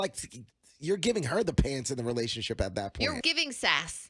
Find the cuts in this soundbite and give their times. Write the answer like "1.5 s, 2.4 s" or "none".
3.2 s